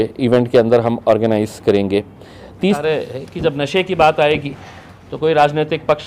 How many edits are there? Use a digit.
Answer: 1